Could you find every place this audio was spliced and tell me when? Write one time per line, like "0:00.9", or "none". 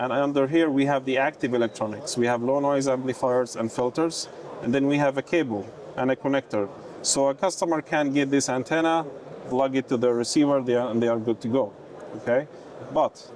none